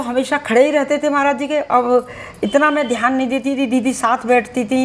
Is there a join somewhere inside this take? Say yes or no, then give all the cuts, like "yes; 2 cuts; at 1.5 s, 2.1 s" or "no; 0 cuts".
no; 0 cuts